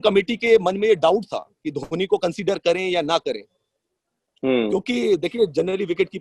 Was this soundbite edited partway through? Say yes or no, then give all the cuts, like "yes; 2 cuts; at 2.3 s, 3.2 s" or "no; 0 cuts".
no; 0 cuts